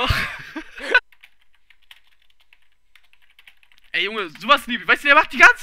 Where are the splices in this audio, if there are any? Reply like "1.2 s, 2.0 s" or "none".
none

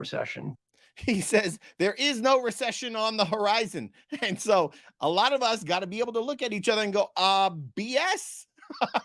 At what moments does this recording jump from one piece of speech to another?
none

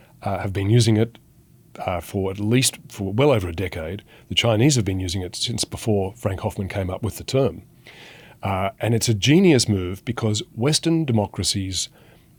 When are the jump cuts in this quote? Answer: none

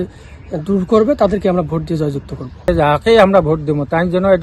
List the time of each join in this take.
2.7 s

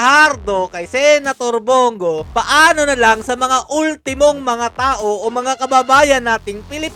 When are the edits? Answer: none

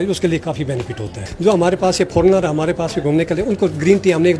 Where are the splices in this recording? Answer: 1.3 s

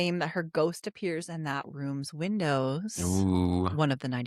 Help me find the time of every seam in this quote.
none

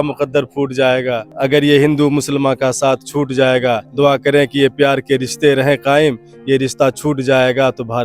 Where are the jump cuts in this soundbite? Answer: 1.3 s, 3.9 s

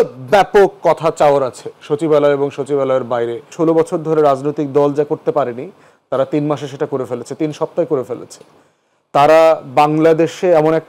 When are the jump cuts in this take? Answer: 3.4 s

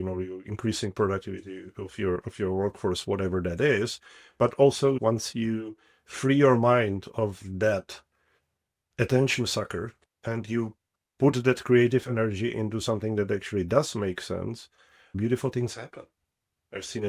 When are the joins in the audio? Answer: 5.0 s, 15.0 s

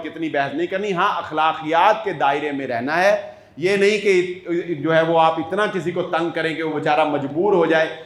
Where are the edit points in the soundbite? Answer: none

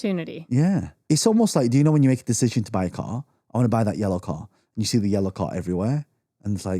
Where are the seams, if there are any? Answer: 0.9 s

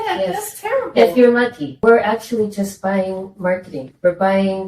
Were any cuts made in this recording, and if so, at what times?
1.7 s

